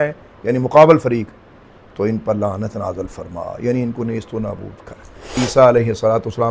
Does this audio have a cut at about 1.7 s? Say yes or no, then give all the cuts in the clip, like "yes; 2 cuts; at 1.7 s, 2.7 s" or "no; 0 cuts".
no; 1 cut; at 5.4 s